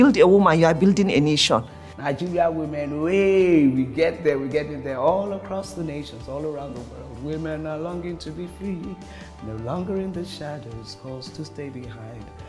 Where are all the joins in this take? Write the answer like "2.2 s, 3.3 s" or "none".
1.8 s